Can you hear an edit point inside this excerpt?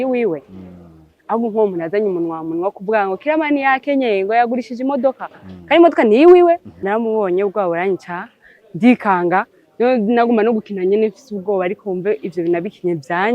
yes; 1 cut; at 6.7 s

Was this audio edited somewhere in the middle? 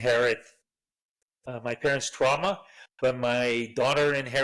no; 0 cuts

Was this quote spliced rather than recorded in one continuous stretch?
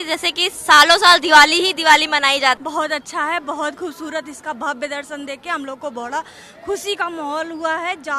yes; 1 cut; at 2.6 s

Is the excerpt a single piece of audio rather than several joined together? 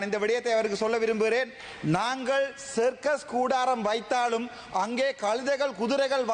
yes; 0 cuts

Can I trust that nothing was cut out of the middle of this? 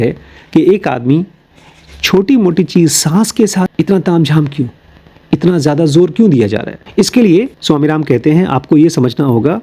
no; 2 cuts; at 3.7 s, 6.8 s

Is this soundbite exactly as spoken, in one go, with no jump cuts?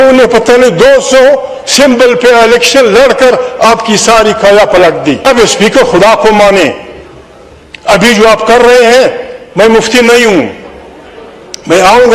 no; 1 cut; at 5.2 s

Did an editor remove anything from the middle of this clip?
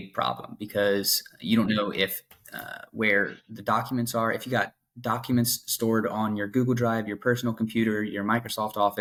no; 0 cuts

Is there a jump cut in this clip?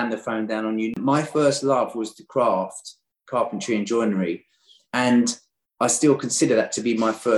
yes; 1 cut; at 1.0 s

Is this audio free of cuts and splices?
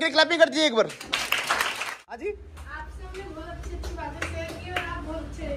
no; 1 cut; at 1.8 s

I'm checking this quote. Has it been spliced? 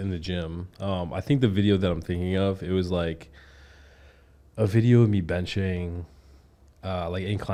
no; 0 cuts

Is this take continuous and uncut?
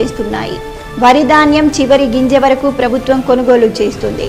yes; 0 cuts

